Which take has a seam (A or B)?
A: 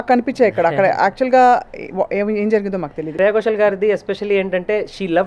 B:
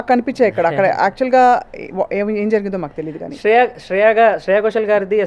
A